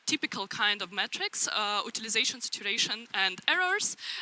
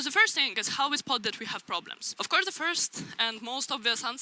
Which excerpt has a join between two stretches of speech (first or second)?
second